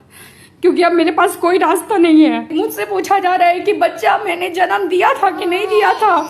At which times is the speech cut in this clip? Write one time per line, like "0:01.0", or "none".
0:02.5